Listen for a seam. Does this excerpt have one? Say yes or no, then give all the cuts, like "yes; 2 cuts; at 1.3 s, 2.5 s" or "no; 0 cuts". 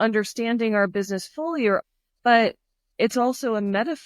yes; 1 cut; at 1.8 s